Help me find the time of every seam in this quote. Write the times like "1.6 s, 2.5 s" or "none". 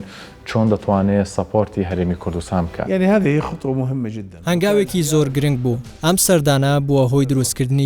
2.8 s, 4.3 s, 5.9 s